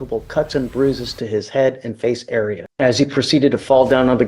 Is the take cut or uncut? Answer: cut